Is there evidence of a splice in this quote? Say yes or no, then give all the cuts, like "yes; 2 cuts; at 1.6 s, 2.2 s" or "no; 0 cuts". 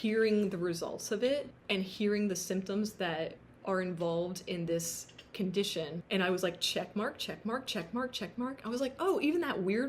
yes; 3 cuts; at 1.6 s, 3.5 s, 6.0 s